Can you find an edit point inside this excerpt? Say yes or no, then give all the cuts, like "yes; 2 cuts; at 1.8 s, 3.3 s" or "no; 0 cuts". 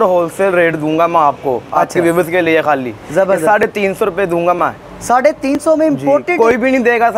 no; 0 cuts